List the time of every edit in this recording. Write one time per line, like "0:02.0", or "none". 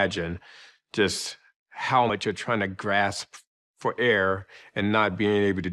0:02.1